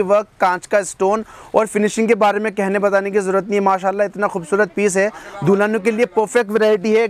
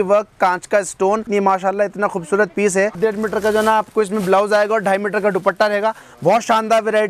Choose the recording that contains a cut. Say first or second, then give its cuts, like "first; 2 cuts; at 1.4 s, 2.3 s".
second; 2 cuts; at 1.3 s, 3.0 s